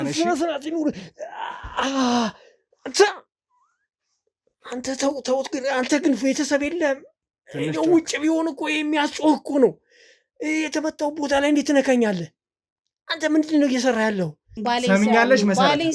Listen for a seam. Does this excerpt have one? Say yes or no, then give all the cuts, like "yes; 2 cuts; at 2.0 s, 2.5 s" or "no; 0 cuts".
yes; 1 cut; at 14.6 s